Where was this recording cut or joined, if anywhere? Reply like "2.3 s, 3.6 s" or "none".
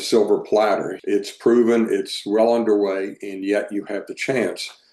0.9 s